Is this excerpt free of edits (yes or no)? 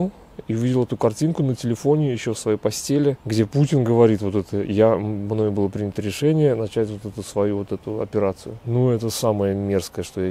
no